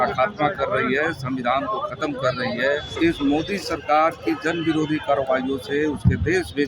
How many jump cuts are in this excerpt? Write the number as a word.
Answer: one